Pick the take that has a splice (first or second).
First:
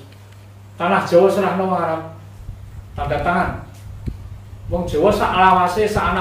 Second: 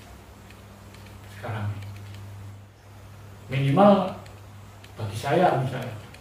second